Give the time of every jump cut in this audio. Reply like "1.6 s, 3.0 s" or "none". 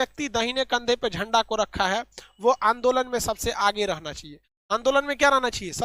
none